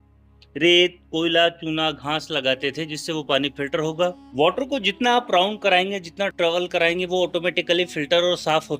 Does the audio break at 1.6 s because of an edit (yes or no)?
no